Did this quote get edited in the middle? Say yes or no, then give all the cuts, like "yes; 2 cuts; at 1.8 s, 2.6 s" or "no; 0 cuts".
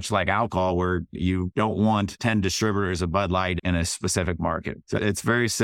yes; 4 cuts; at 1.1 s, 2.1 s, 3.6 s, 4.8 s